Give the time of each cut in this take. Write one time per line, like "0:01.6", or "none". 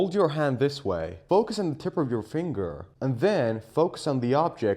0:01.1